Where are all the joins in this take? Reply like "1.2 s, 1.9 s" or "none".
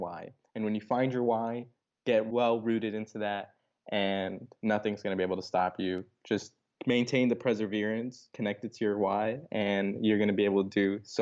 none